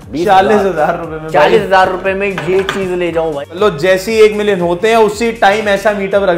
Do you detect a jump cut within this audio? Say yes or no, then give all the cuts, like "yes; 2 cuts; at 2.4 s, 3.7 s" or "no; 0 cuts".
yes; 1 cut; at 3.5 s